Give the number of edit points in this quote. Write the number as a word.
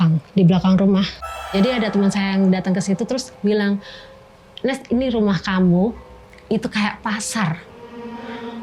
one